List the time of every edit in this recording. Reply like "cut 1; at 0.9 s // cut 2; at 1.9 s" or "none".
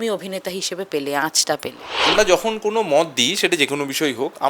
cut 1; at 2.1 s